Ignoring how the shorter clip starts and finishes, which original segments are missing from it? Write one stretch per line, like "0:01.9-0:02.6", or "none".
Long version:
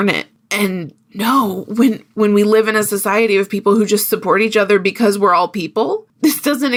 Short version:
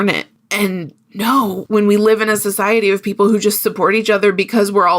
0:01.6-0:02.1